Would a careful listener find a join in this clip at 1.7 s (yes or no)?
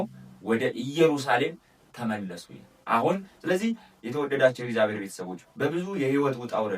no